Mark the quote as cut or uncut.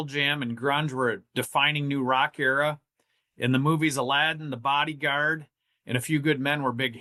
uncut